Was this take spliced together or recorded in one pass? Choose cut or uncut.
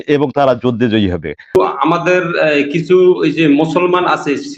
cut